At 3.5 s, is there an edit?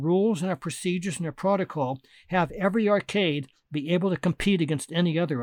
no; 0 cuts

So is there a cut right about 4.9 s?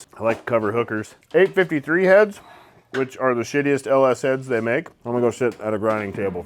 yes; 2 cuts; at 1.1 s, 4.9 s

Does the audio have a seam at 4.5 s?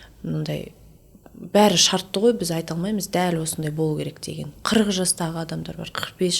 yes; 1 cut; at 4.5 s

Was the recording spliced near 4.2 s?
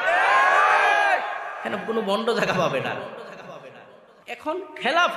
yes; 1 cut; at 4.2 s

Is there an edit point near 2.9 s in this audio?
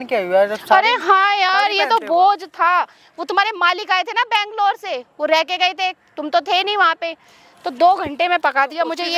no; 0 cuts

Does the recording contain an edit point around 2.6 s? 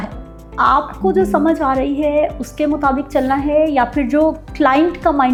no; 0 cuts

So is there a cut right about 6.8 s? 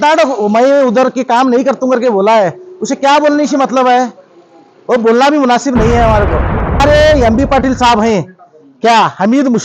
yes; 1 cut; at 6.8 s

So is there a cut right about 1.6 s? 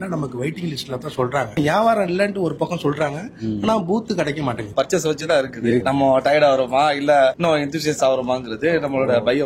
yes; 3 cuts; at 1.6 s, 4.7 s, 5.8 s

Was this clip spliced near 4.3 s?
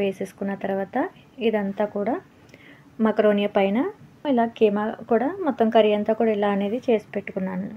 yes; 1 cut; at 4.3 s

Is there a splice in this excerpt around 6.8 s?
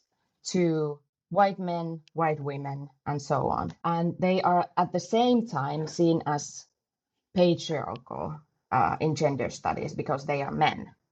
no; 1 cut; at 3.7 s

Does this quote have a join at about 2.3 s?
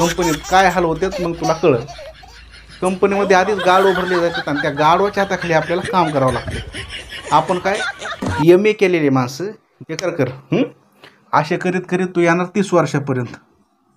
no; 1 cut; at 9.9 s

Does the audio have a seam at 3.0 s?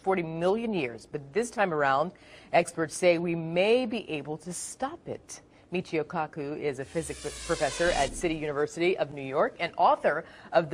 no; 1 cut; at 6.1 s

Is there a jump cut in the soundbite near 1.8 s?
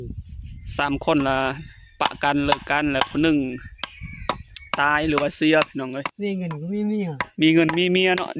no; 1 cut; at 6.1 s

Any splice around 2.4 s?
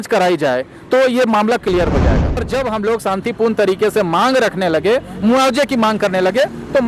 yes; 1 cut; at 2.4 s

